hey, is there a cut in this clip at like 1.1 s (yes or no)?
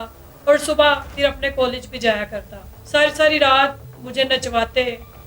no